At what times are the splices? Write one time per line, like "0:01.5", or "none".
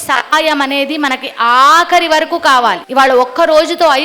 0:02.8